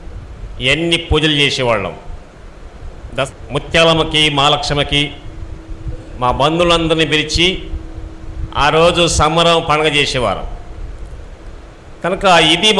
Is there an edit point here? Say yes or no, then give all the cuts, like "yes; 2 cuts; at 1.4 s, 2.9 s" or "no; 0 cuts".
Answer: yes; 1 cut; at 3.3 s